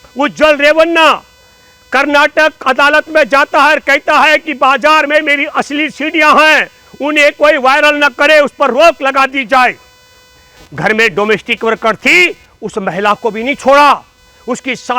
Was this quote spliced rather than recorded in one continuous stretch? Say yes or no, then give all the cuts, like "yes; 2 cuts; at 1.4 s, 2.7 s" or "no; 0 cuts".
yes; 1 cut; at 10.5 s